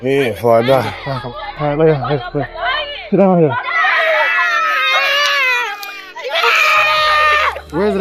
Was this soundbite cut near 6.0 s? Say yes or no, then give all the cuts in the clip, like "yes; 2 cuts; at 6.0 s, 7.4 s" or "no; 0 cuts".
no; 0 cuts